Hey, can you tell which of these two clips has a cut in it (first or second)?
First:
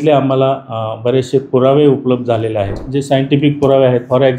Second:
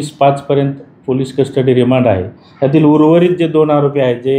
first